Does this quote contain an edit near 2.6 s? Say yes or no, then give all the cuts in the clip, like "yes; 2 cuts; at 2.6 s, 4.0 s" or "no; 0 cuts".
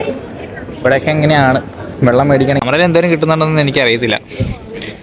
yes; 1 cut; at 2.6 s